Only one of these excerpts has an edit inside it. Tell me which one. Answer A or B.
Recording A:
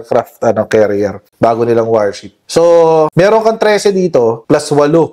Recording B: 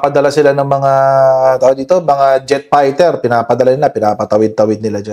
A